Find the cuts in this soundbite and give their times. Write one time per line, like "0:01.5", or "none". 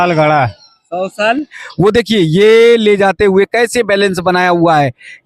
0:01.6

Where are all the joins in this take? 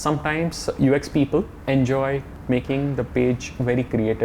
0:01.6
0:02.3

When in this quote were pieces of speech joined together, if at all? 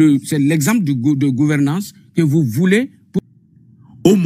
0:03.2

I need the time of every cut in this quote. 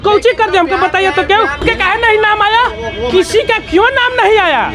0:01.6

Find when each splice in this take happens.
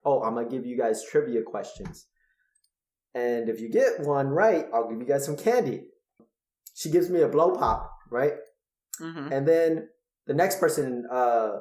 0:06.2

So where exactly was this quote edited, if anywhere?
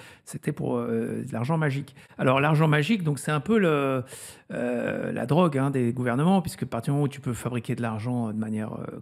0:02.0

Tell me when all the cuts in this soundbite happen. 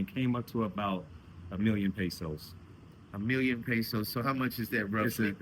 none

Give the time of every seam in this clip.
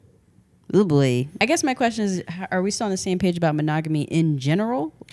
0:01.3

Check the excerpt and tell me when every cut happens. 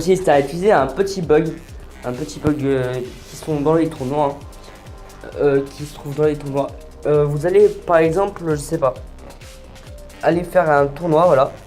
0:06.6

